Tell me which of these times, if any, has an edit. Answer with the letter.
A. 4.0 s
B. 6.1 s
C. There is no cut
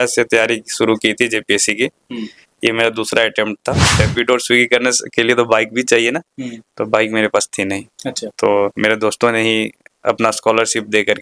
A